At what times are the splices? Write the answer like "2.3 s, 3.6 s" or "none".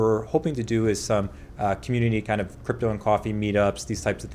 none